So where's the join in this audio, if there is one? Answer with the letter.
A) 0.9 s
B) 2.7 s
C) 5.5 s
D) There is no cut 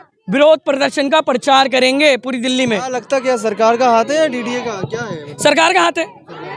D